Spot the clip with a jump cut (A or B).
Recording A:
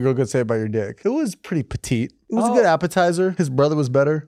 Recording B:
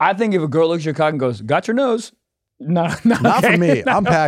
A